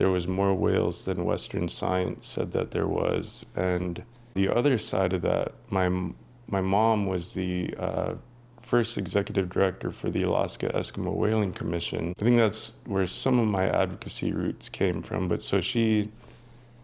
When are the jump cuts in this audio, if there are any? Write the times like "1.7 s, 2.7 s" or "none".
4.4 s, 12.1 s